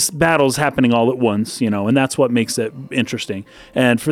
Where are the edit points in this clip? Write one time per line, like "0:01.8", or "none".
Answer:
none